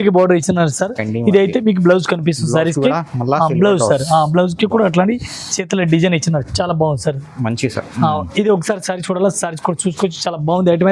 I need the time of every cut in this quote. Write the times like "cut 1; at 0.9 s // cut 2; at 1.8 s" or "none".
none